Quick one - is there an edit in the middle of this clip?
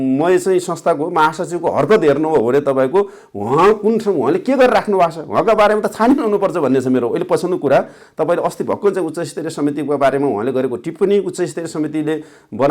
no; 0 cuts

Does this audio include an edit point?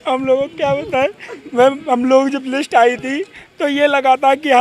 no; 0 cuts

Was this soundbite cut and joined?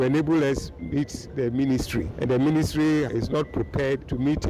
yes; 2 cuts; at 2.1 s, 3.5 s

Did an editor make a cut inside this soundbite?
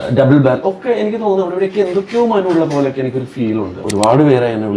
yes; 1 cut; at 3.8 s

